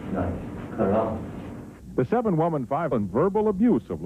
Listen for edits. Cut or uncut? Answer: uncut